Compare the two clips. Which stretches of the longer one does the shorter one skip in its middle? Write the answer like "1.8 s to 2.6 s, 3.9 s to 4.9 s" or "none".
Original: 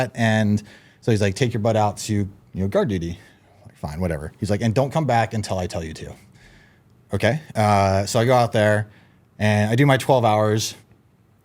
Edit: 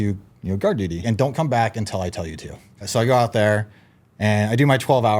3.1 s to 4.6 s, 6.4 s to 8.1 s